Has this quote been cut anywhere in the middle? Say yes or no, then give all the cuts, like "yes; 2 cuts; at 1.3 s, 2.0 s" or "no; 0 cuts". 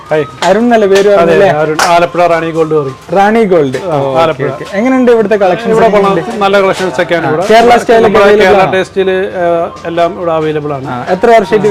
no; 0 cuts